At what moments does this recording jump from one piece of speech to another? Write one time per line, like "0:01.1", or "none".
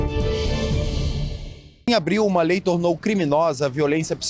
0:01.9